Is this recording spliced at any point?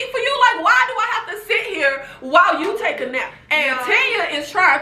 yes; 1 cut; at 3.4 s

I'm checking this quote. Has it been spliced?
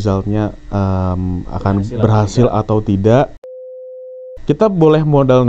yes; 1 cut; at 3.9 s

